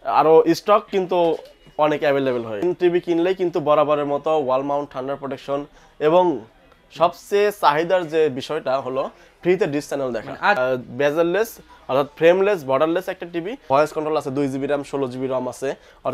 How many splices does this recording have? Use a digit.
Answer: 3